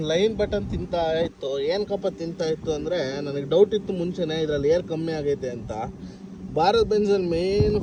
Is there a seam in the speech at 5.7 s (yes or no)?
no